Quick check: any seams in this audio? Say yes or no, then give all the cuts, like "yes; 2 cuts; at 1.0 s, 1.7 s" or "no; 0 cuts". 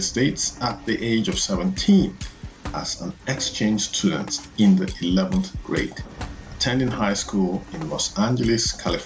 no; 0 cuts